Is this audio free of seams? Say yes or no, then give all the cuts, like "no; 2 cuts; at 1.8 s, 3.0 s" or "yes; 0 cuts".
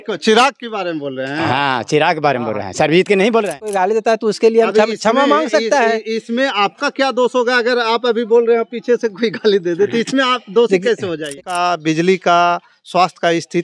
no; 2 cuts; at 3.7 s, 11.3 s